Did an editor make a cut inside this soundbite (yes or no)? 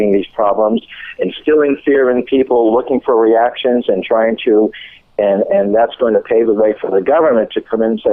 no